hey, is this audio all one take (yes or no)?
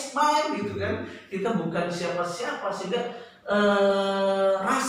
yes